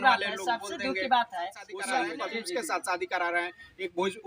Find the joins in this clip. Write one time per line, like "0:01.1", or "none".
0:02.1